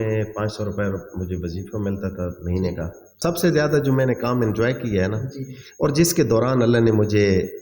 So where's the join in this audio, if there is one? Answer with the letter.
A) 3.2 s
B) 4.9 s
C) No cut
A